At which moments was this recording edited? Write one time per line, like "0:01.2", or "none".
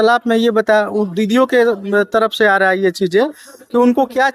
none